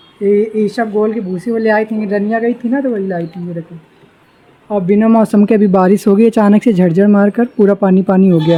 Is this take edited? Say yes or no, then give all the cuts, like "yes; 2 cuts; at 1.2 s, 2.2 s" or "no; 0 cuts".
no; 0 cuts